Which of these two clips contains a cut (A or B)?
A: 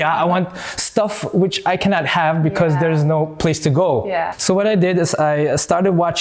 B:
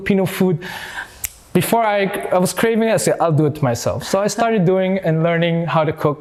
A